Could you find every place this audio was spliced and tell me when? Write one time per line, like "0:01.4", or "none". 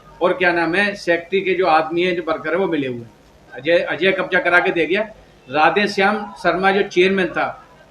0:03.5